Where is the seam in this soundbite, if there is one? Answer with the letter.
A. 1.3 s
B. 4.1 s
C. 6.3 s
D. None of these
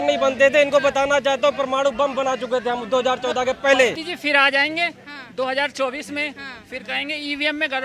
B